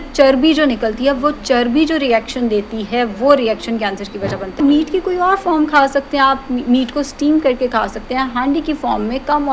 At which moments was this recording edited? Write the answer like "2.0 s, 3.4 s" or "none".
4.6 s